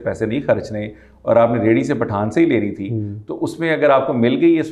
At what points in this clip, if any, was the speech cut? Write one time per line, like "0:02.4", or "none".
none

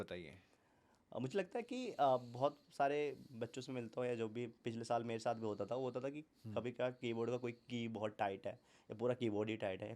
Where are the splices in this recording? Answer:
0:06.3

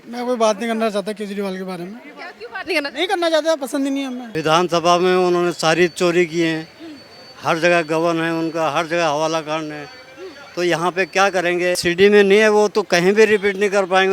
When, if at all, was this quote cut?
0:04.2
0:11.8

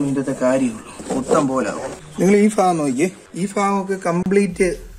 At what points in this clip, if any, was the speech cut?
0:00.9
0:02.0
0:03.2

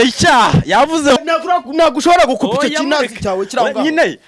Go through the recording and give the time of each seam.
0:01.2

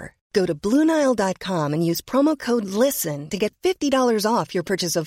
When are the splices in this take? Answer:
none

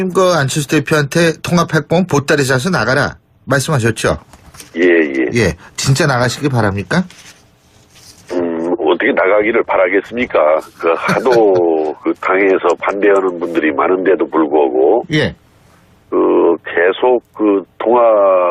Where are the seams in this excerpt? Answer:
0:12.6

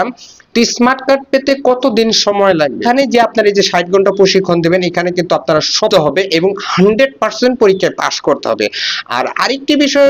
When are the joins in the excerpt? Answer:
0:02.8
0:05.9

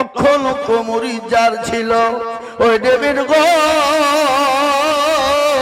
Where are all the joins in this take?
none

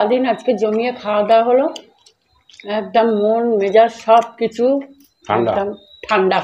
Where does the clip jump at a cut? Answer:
none

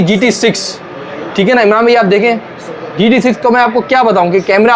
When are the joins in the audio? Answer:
none

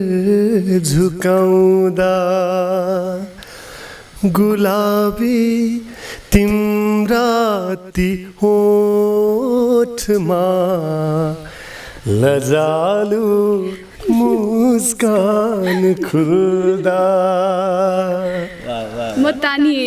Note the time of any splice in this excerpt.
none

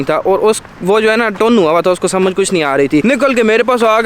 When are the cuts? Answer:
0:03.0

